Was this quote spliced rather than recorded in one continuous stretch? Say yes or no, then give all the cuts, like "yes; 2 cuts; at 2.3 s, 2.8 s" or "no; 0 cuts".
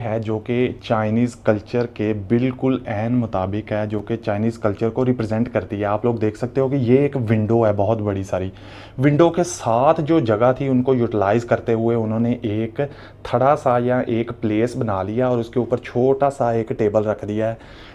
no; 0 cuts